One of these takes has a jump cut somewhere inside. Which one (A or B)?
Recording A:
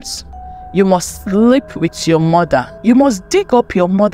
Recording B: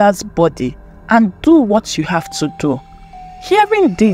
A